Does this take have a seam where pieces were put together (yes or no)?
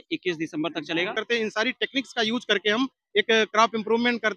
yes